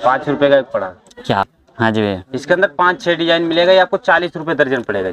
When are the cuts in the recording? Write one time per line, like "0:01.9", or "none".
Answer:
0:01.4